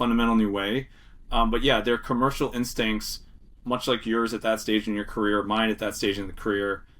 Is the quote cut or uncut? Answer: uncut